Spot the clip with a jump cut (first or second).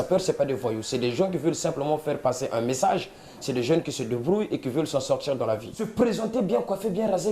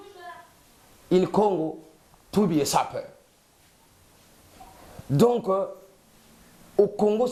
first